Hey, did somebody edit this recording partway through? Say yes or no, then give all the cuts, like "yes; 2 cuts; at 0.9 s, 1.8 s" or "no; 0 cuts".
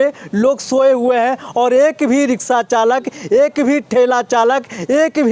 no; 0 cuts